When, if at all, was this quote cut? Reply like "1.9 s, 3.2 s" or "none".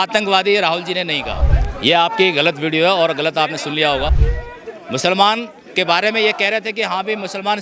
1.5 s, 4.2 s